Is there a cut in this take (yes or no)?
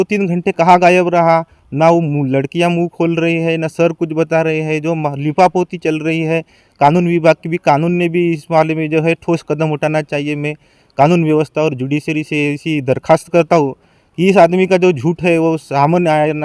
no